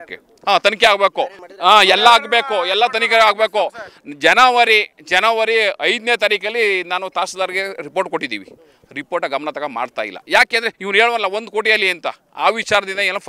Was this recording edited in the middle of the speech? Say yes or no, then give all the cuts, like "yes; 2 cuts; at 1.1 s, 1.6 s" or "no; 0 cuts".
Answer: no; 0 cuts